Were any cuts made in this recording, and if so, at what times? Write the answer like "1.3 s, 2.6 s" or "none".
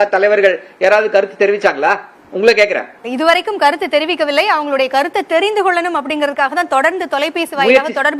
none